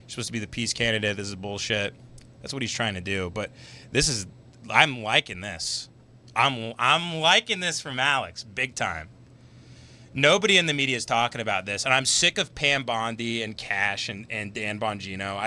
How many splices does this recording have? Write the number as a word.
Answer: zero